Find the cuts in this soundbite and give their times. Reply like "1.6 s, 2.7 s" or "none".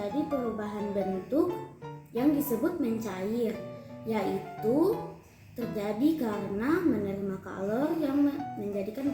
none

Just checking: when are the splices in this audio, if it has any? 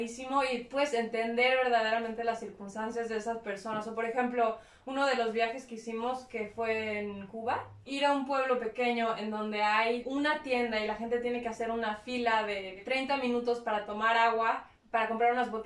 7.9 s, 10.0 s, 12.8 s

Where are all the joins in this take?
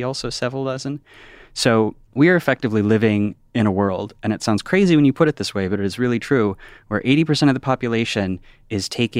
2.0 s

